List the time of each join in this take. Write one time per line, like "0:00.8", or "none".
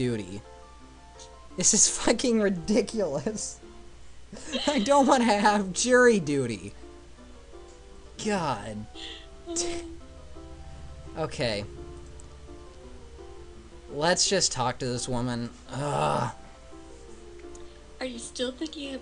0:09.4